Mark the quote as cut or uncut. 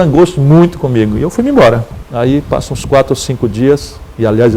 uncut